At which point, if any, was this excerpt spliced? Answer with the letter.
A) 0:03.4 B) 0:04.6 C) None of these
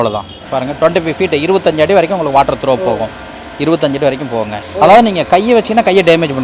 B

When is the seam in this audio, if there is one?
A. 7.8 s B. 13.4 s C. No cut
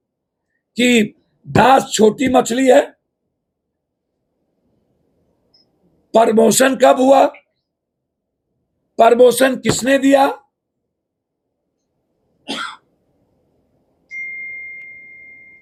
C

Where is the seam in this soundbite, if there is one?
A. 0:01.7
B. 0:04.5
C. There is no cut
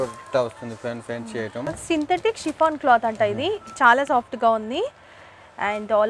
A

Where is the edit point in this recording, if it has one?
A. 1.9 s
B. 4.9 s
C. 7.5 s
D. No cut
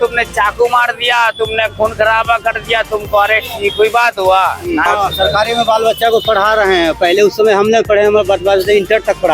B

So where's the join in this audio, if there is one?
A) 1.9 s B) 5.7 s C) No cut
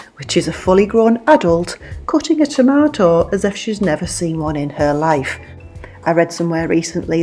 B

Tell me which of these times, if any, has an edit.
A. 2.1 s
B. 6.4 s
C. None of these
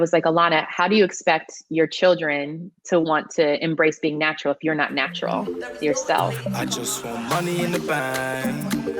B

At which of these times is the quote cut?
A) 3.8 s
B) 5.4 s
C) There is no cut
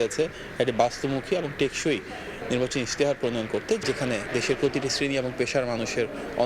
A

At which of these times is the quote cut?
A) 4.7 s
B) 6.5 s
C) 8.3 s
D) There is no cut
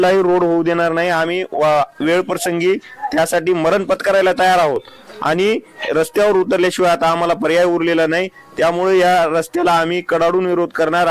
D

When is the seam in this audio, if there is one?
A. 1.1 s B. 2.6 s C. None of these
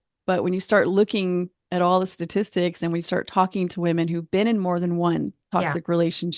C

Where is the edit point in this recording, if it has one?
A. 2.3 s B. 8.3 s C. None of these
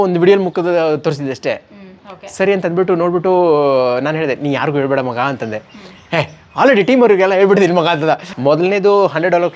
B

